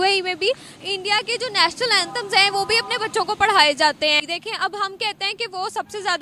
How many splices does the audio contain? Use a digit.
1